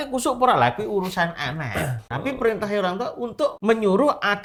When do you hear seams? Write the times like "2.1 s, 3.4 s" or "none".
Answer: none